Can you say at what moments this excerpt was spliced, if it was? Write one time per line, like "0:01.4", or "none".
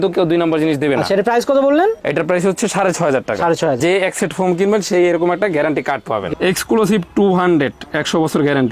0:03.8
0:06.3